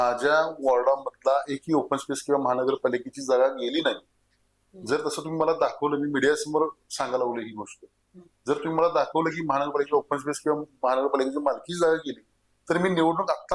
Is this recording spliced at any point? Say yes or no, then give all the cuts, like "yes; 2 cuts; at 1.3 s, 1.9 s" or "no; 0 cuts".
no; 0 cuts